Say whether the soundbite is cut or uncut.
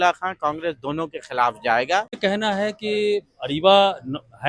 cut